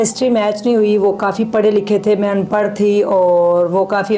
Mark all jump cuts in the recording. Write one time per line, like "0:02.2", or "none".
none